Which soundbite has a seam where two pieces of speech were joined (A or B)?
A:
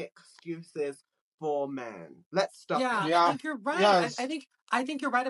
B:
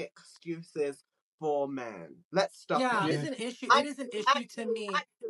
B